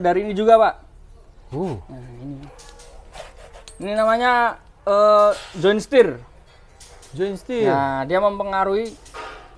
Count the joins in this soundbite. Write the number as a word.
zero